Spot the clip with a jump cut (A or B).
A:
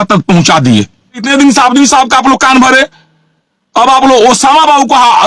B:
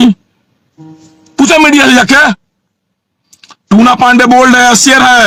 A